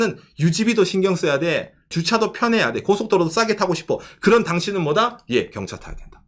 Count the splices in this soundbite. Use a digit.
1